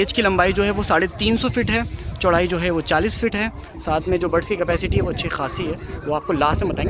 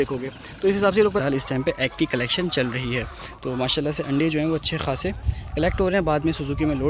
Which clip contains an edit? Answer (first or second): second